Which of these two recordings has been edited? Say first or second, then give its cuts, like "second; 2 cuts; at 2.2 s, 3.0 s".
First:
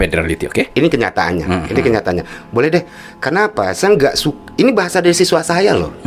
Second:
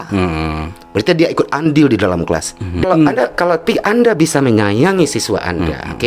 second; 1 cut; at 2.8 s